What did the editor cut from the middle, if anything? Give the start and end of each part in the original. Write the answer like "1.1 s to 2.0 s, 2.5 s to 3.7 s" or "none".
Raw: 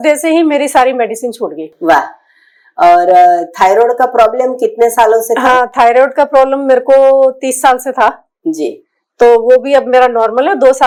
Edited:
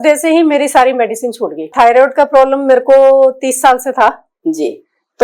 1.7 s to 5.7 s